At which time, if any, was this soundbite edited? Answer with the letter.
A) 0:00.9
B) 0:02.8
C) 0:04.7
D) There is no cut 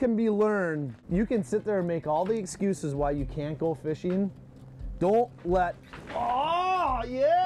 A